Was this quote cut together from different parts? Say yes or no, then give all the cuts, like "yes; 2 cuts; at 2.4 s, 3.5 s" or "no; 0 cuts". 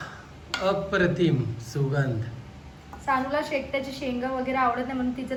no; 0 cuts